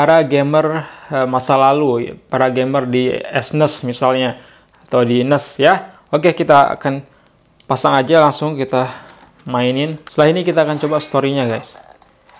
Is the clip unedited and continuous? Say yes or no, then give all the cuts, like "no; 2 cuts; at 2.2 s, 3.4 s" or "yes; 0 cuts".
no; 1 cut; at 10.0 s